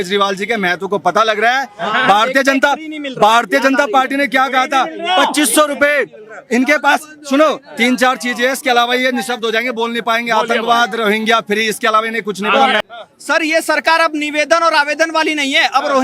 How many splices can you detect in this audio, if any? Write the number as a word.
one